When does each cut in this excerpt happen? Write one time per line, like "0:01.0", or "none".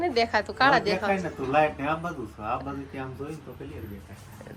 none